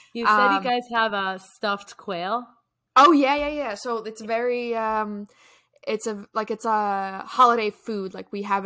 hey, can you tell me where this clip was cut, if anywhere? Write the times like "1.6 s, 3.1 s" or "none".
none